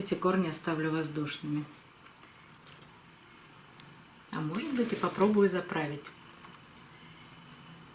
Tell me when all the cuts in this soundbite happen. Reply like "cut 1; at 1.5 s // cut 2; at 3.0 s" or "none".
cut 1; at 2.9 s